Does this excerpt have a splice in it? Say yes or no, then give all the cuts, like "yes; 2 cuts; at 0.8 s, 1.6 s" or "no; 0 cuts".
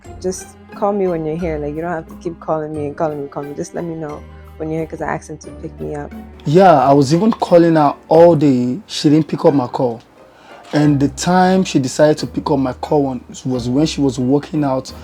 yes; 1 cut; at 6.3 s